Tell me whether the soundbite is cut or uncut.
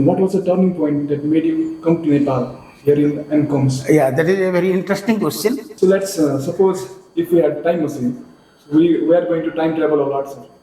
cut